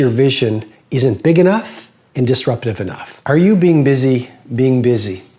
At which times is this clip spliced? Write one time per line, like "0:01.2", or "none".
0:03.1